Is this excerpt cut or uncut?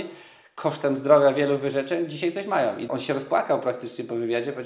cut